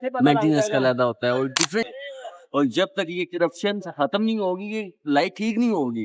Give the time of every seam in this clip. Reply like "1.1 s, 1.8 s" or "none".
1.8 s